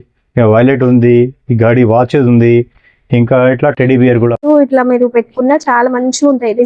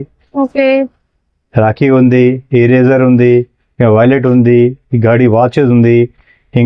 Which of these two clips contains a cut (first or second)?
first